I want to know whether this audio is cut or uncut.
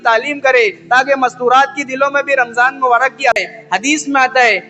cut